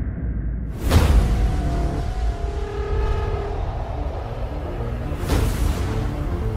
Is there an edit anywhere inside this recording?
no; 0 cuts

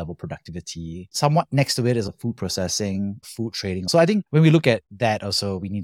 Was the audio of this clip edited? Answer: yes; 2 cuts; at 2.1 s, 3.9 s

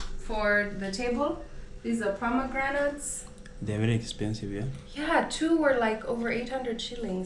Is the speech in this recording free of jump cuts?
yes; 0 cuts

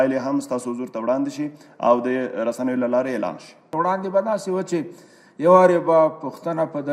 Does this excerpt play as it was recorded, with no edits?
no; 1 cut; at 3.6 s

